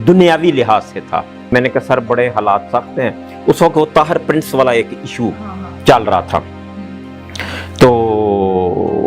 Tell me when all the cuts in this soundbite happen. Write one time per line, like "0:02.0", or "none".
0:01.5